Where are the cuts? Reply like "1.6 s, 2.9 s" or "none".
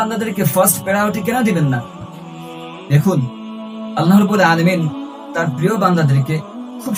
none